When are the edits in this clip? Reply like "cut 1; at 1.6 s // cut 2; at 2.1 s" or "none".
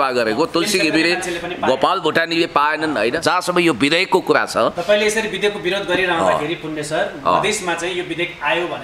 cut 1; at 3.2 s